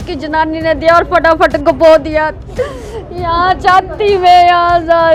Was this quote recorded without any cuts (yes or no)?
yes